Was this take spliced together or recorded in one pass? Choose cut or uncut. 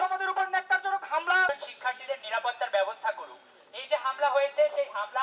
cut